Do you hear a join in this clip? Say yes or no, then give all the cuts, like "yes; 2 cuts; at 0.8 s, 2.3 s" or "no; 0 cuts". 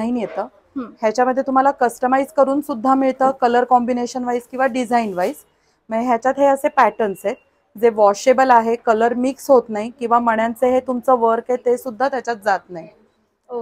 no; 0 cuts